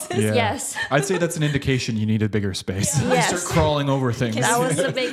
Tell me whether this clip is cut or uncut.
uncut